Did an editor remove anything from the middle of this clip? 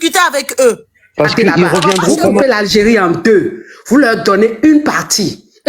yes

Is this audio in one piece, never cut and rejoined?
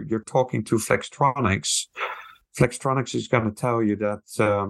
yes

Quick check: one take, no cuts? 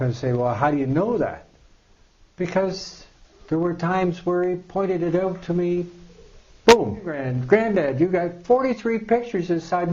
no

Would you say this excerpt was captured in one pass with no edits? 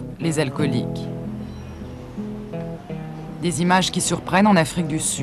yes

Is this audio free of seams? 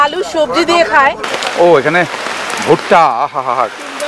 no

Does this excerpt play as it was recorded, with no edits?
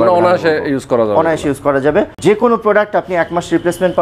no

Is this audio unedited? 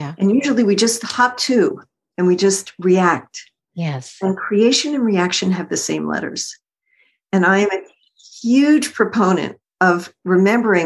yes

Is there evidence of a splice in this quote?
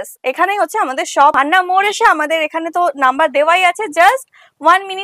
yes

